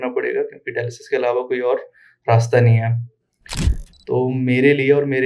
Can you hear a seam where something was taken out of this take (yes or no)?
no